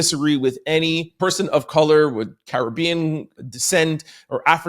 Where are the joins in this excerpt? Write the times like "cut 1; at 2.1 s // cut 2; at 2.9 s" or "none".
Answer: cut 1; at 1.1 s // cut 2; at 3.3 s